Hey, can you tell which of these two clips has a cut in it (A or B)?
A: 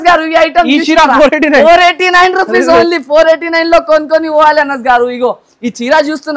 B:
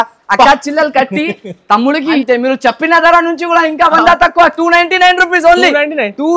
B